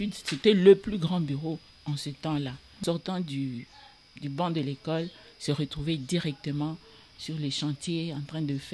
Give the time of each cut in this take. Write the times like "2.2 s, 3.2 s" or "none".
2.8 s